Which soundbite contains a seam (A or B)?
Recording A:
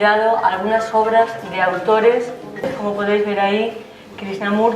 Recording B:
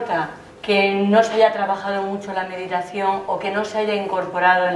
A